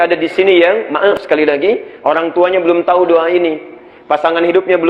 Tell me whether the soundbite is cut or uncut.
cut